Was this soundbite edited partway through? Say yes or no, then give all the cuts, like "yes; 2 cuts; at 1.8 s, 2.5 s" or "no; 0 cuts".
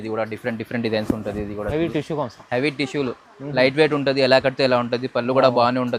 no; 0 cuts